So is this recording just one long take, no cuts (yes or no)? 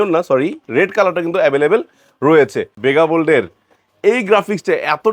no